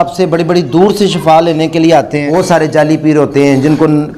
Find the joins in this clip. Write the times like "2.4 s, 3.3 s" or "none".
2.2 s